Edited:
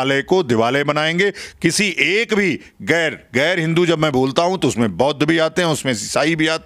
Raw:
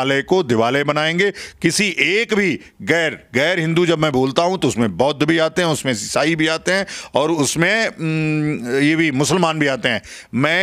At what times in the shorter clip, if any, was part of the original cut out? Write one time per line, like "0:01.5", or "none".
none